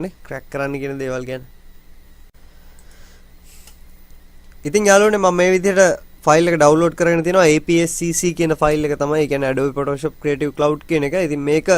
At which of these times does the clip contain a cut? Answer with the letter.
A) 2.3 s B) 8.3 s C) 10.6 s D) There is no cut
B